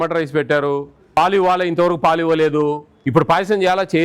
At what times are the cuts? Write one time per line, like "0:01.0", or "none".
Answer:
0:01.2
0:02.9